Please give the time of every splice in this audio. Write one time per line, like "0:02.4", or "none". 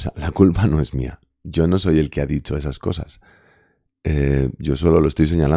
none